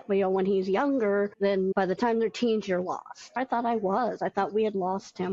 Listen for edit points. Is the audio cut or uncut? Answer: cut